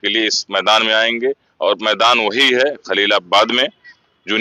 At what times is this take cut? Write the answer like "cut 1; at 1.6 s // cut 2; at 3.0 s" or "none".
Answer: none